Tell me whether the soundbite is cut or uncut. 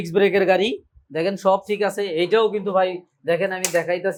uncut